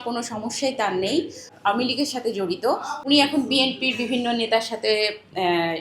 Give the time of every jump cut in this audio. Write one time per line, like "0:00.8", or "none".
0:01.5
0:02.9